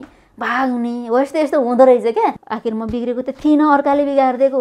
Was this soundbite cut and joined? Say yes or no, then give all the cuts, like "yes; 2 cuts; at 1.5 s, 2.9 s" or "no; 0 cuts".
yes; 1 cut; at 2.4 s